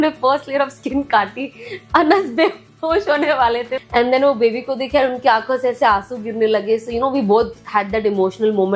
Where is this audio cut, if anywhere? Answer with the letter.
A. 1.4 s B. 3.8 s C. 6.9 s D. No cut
B